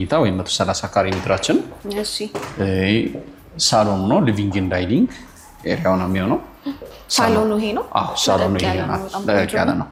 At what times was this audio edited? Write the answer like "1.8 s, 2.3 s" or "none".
none